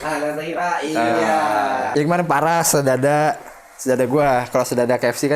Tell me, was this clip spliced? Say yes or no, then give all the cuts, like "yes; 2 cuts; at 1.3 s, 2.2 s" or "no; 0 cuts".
yes; 1 cut; at 1.9 s